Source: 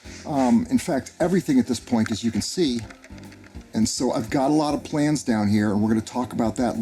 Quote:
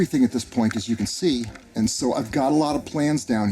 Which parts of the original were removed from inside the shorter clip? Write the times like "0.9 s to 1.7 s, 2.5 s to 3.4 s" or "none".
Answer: 2.9 s to 3.6 s